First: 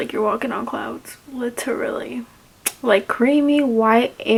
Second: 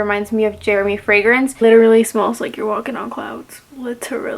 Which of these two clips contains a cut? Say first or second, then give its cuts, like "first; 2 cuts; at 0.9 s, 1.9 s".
second; 1 cut; at 1.5 s